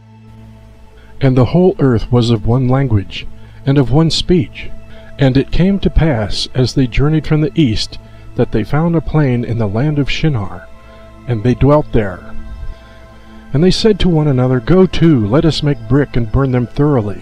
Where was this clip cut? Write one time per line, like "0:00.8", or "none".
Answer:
none